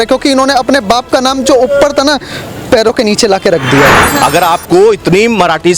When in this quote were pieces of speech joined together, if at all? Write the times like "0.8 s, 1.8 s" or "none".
4.0 s